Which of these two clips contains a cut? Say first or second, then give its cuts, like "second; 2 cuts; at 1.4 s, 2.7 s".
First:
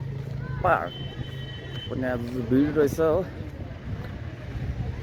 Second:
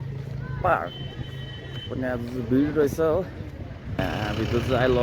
second; 1 cut; at 4.0 s